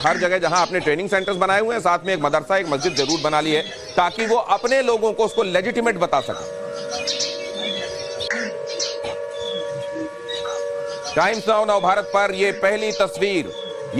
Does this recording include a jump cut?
yes; 1 cut; at 3.2 s

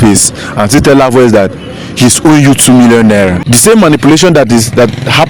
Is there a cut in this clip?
yes; 1 cut; at 3.4 s

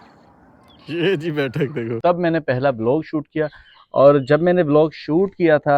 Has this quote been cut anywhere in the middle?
yes; 1 cut; at 2.0 s

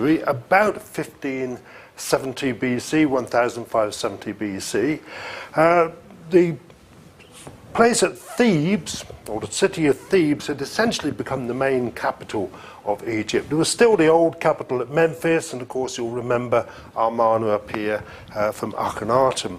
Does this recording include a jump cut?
yes; 1 cut; at 9.8 s

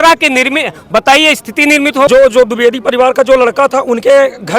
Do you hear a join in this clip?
yes; 1 cut; at 2.1 s

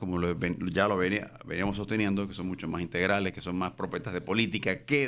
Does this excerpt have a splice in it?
no; 0 cuts

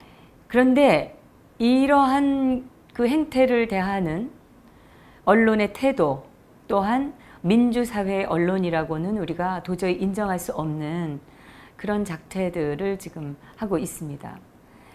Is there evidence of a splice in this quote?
no; 0 cuts

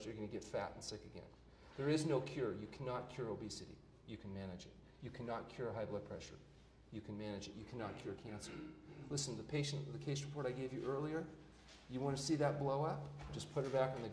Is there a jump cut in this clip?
no; 0 cuts

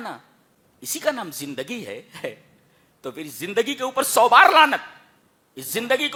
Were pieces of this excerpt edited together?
no; 0 cuts

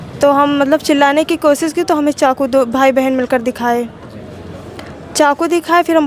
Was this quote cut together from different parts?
no; 0 cuts

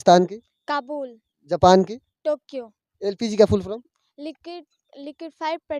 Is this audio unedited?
yes; 0 cuts

